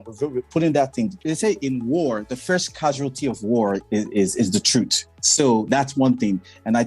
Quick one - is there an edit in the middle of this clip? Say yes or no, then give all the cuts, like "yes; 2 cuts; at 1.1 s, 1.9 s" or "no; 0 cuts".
yes; 2 cuts; at 1.2 s, 3.8 s